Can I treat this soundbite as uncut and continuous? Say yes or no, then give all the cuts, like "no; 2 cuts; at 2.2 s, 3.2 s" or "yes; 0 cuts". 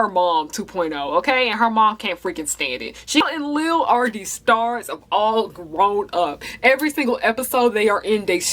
no; 1 cut; at 3.2 s